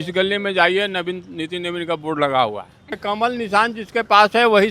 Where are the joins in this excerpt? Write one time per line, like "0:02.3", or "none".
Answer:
0:03.0

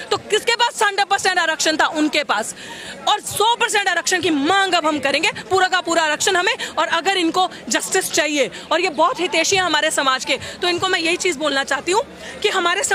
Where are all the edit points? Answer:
none

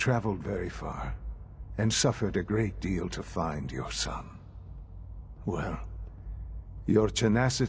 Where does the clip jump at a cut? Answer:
none

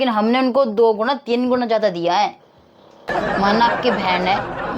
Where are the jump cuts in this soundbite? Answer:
0:03.0

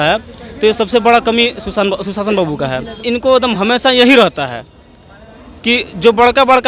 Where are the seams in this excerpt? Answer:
0:03.0

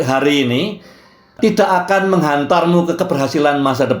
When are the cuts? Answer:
0:01.4

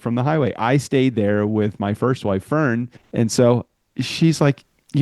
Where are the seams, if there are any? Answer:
0:03.0

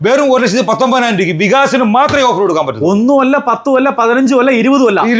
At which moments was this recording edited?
none

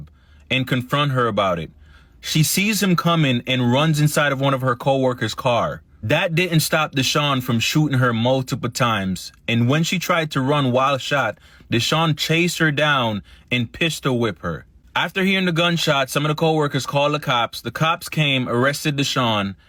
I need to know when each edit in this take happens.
none

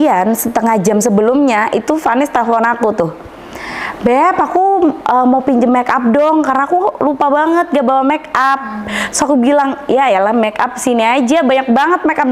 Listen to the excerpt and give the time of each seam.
none

